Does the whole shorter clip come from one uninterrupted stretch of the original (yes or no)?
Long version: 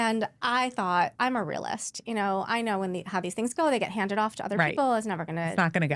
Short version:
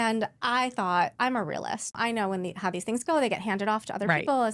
no